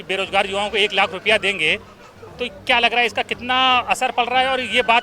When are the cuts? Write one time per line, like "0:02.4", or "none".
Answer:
none